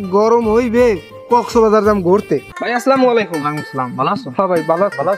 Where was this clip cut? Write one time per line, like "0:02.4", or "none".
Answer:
0:02.4